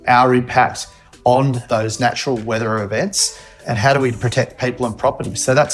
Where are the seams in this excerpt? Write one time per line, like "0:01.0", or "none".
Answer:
0:01.6
0:03.5